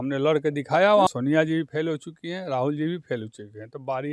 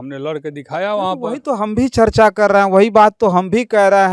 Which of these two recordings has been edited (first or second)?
first